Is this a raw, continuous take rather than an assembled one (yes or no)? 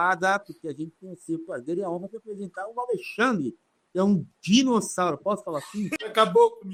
yes